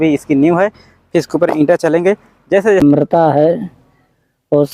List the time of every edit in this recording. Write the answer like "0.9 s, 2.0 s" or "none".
2.8 s

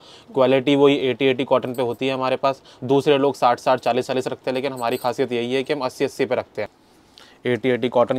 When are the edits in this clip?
6.8 s

